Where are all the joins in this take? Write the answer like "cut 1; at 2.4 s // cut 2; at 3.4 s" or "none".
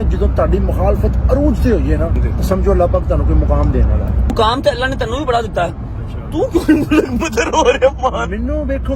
cut 1; at 2.2 s // cut 2; at 4.3 s